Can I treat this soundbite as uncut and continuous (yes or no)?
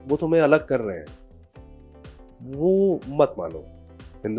yes